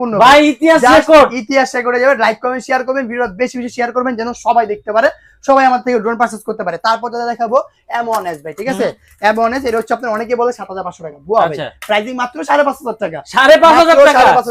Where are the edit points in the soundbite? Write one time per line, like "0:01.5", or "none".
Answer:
none